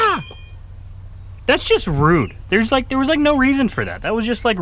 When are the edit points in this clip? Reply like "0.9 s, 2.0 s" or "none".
none